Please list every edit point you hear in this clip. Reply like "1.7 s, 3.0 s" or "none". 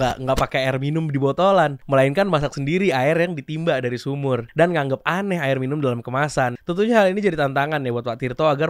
4.5 s, 6.6 s